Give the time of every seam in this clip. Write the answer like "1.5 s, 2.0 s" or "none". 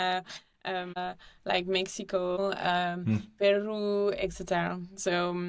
1.0 s, 2.4 s